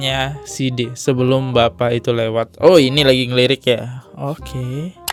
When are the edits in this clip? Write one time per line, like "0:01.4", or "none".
none